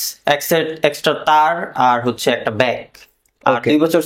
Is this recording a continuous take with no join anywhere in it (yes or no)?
yes